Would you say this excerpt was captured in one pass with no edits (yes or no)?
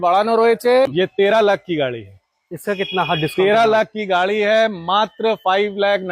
no